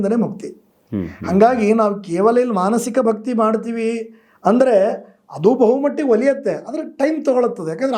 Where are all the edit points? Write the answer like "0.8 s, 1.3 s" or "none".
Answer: none